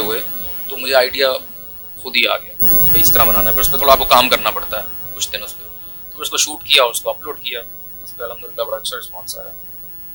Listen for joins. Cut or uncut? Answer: uncut